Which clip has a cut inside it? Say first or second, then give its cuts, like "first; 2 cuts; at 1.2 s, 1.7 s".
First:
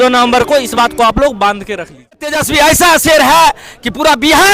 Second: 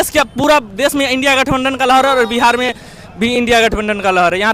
first; 1 cut; at 2.3 s